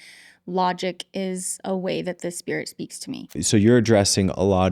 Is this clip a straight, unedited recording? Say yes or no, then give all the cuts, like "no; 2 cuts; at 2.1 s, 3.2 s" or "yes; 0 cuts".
no; 1 cut; at 3.4 s